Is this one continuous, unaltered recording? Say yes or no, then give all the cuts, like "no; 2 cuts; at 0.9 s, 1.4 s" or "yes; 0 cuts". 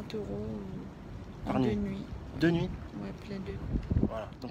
yes; 0 cuts